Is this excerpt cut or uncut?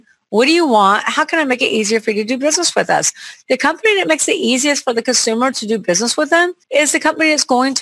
cut